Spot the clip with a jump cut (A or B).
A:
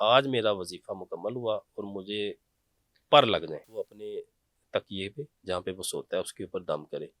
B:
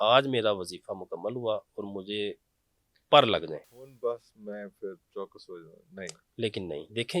A